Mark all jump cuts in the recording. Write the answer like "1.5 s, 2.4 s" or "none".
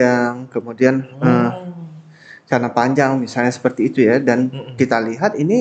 none